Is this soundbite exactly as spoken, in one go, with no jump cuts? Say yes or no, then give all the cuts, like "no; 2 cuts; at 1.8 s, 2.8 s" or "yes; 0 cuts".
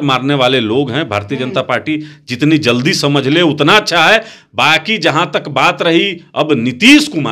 yes; 0 cuts